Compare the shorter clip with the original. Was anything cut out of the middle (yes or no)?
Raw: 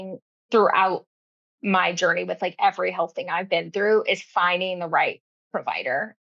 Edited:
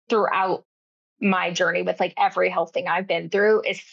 no